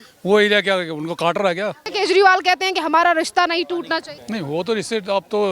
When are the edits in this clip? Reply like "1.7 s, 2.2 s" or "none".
1.8 s, 4.2 s